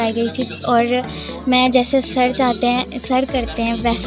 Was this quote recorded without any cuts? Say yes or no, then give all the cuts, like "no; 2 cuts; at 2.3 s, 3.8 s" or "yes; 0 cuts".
yes; 0 cuts